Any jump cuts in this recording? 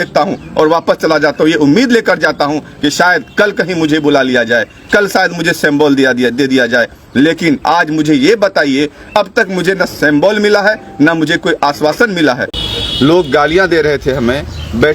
yes; 1 cut; at 12.5 s

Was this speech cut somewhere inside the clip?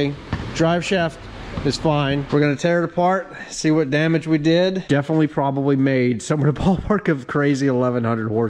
yes; 2 cuts; at 2.3 s, 4.8 s

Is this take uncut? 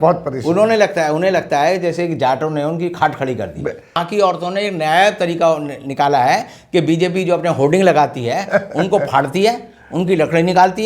no; 1 cut; at 4.0 s

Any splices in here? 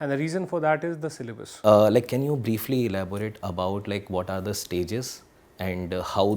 yes; 1 cut; at 1.4 s

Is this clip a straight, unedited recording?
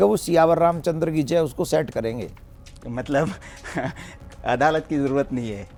yes; 0 cuts

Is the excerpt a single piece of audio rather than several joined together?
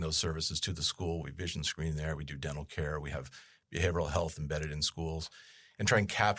yes; 0 cuts

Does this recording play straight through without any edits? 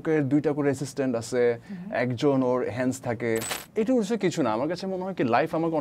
no; 1 cut; at 3.6 s

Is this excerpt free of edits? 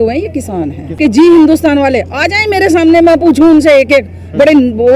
no; 1 cut; at 0.9 s

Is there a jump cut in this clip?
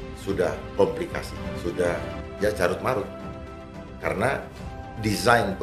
yes; 2 cuts; at 1.4 s, 2.1 s

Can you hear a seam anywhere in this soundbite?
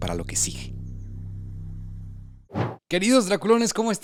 no; 0 cuts

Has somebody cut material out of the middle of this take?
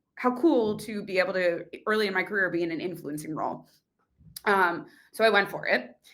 no; 0 cuts

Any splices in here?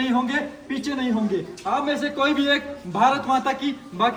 no; 0 cuts

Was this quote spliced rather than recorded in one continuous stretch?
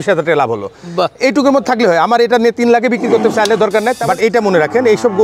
yes; 1 cut; at 4.0 s

